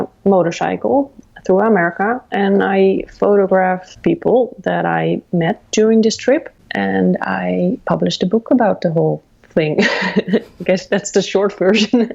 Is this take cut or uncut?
cut